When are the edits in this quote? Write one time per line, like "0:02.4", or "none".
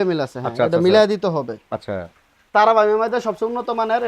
0:02.4